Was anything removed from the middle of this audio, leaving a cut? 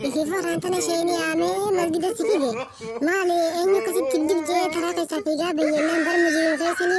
no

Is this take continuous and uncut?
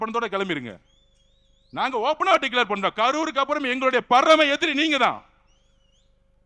yes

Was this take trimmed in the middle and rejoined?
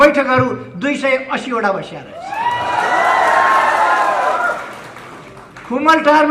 no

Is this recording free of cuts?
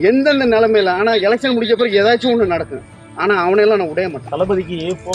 no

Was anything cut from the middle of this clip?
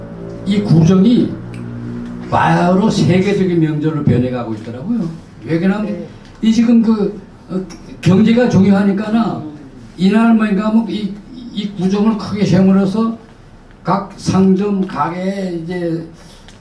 no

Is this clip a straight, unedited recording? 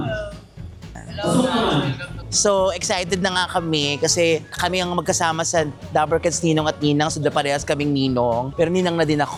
yes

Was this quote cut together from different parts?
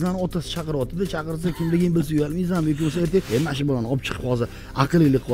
yes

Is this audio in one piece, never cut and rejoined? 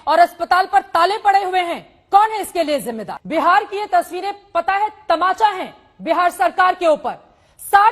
no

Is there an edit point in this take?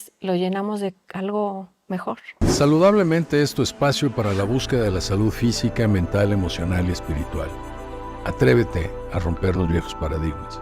yes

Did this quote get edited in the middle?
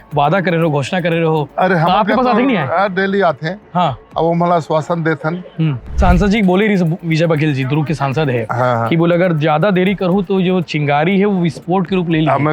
yes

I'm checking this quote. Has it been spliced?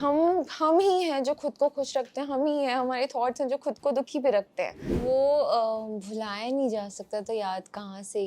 yes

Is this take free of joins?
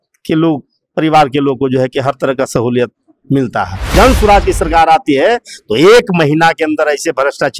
no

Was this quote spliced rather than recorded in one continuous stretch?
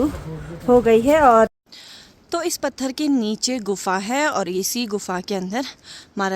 yes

